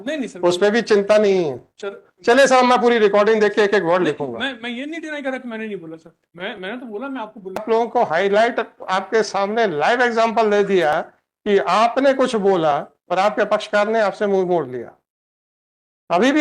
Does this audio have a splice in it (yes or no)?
yes